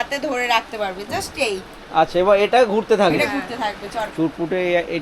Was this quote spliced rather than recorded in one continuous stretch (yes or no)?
yes